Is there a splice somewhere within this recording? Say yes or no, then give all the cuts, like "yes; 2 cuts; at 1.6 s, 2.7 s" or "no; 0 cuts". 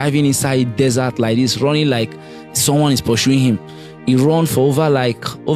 no; 0 cuts